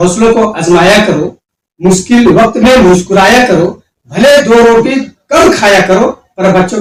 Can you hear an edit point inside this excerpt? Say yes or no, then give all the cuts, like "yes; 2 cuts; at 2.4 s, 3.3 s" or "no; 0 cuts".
no; 0 cuts